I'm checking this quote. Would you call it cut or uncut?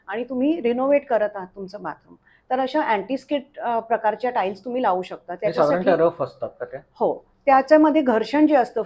uncut